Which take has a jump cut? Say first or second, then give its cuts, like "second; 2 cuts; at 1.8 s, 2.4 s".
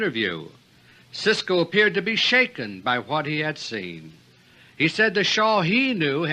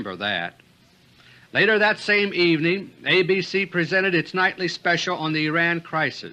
first; 1 cut; at 2.4 s